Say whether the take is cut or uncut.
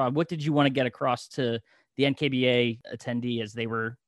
cut